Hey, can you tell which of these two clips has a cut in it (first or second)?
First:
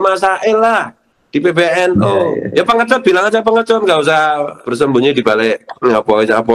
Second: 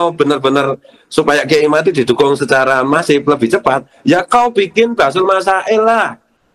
first